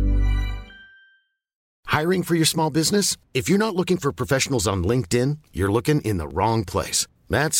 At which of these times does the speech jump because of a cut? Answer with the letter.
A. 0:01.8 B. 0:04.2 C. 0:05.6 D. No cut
A